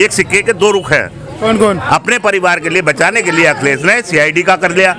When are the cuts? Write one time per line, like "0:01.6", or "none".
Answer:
0:01.8